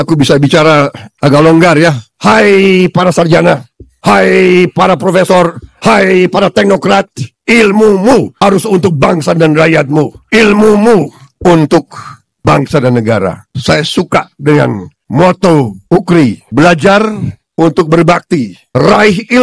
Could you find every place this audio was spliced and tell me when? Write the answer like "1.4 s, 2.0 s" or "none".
1.0 s, 2.1 s